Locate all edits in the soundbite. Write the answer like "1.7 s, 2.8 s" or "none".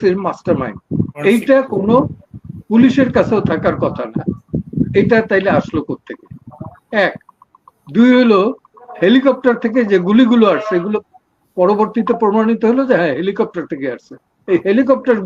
1.2 s